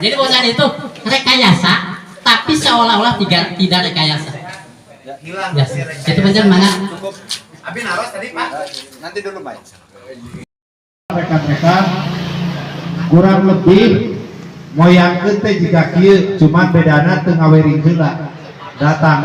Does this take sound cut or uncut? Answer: uncut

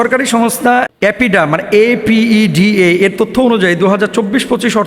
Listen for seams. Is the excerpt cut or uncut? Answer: cut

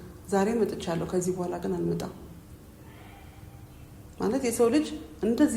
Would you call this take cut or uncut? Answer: uncut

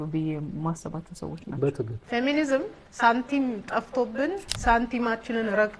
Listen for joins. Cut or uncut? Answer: cut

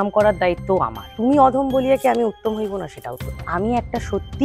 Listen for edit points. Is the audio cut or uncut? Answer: cut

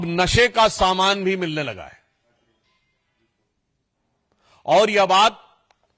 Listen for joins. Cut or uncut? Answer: uncut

